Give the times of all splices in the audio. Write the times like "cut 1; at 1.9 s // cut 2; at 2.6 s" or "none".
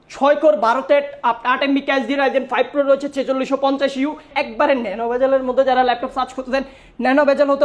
cut 1; at 4.3 s